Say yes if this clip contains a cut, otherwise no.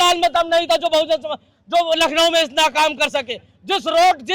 no